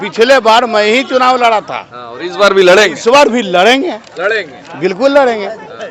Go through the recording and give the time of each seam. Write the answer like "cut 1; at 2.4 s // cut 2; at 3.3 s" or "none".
none